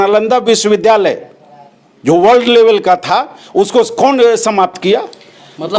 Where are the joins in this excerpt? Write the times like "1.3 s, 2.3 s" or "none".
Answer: none